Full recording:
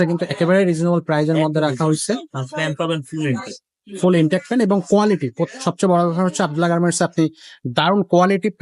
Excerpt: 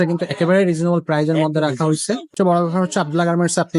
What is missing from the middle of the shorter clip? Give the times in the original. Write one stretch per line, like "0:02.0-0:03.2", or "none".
0:02.3-0:05.8